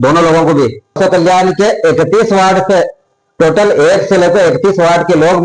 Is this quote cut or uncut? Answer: cut